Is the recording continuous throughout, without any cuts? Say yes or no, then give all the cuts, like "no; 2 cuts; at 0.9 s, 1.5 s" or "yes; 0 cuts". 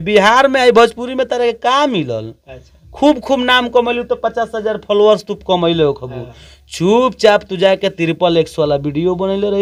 yes; 0 cuts